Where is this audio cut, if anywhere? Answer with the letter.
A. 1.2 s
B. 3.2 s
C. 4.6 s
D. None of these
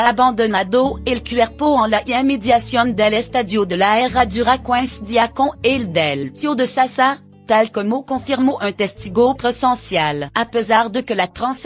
B